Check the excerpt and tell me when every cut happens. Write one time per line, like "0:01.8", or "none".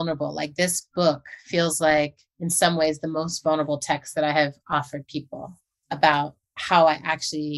none